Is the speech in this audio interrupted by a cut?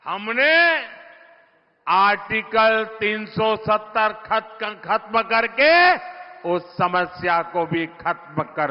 no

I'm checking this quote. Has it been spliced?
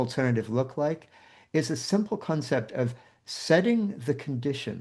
no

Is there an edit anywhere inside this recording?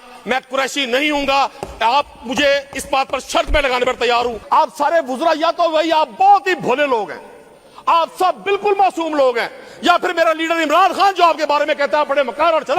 yes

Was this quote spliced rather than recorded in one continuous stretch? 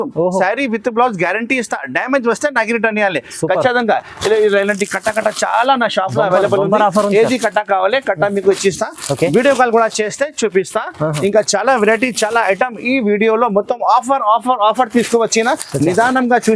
no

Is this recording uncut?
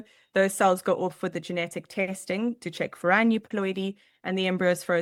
yes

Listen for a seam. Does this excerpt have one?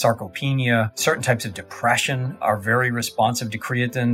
yes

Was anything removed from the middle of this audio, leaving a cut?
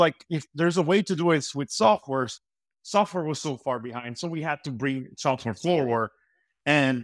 no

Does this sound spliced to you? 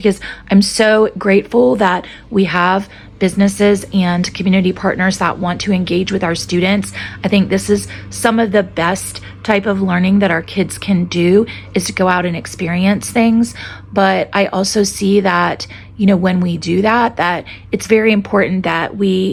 no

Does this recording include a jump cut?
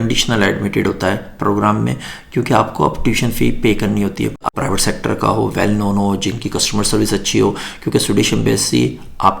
yes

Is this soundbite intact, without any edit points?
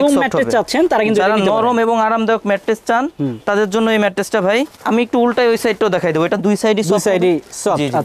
yes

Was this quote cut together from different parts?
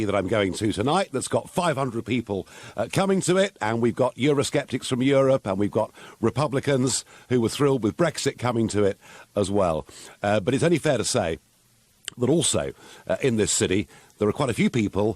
yes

